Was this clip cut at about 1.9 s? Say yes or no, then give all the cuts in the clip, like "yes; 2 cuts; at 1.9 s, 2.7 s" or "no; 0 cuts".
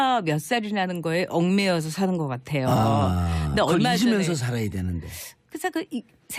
yes; 1 cut; at 1.9 s